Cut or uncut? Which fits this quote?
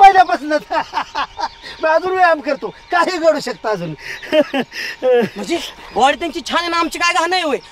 uncut